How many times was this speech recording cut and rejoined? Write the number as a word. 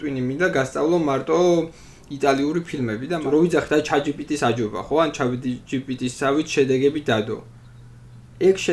one